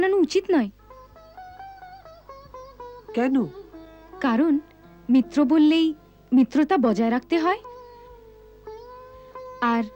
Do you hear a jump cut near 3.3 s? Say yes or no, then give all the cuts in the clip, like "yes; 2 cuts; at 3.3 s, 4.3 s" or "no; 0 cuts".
no; 0 cuts